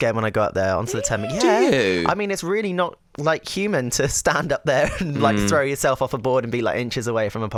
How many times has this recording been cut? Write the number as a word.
zero